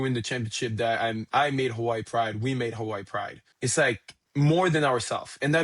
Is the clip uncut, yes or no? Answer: no